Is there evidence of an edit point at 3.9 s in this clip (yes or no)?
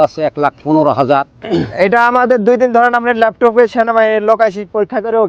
no